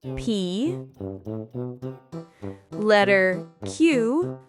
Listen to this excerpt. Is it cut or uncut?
cut